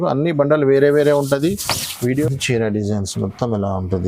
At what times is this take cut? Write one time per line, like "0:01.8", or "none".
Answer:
0:02.2